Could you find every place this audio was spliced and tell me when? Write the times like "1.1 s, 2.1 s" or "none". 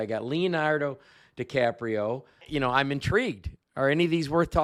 none